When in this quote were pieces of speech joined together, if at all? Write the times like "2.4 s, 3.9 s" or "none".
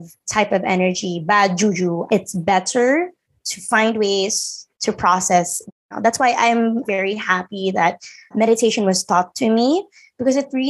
2.0 s, 5.8 s

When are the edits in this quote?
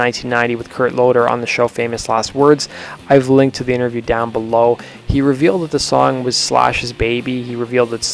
none

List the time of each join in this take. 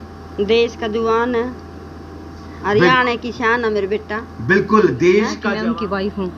5.4 s

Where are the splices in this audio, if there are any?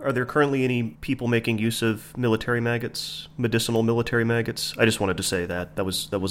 none

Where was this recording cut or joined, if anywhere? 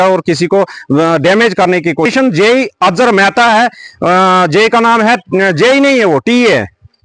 2.1 s

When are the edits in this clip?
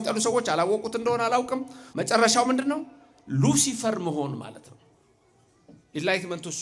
none

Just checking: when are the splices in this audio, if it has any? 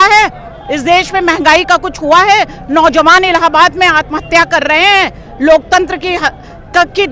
none

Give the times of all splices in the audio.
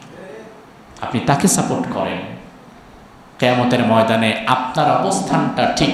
none

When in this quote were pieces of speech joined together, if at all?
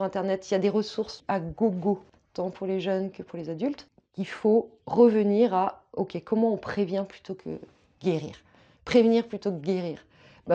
1.1 s, 2.2 s, 4.0 s

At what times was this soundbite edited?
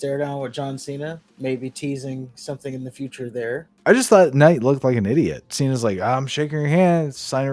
1.3 s, 3.7 s, 5.4 s

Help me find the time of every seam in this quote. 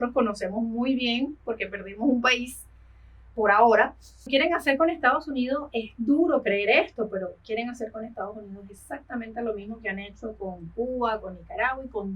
4.3 s

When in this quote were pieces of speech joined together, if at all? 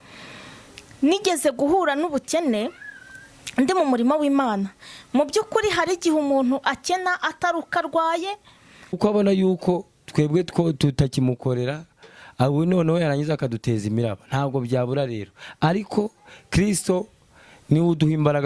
9.0 s

